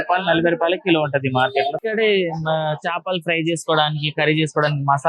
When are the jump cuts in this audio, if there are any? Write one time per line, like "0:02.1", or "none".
0:01.8